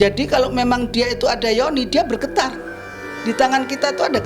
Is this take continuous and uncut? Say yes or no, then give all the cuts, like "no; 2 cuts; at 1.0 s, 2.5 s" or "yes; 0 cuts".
yes; 0 cuts